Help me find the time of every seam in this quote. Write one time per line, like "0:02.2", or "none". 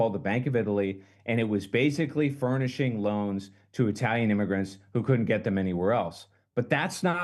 none